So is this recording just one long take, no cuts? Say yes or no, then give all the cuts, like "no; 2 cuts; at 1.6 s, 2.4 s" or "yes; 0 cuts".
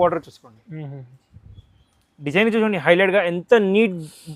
yes; 0 cuts